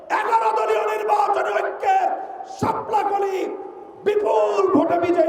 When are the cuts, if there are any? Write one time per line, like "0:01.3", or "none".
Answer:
none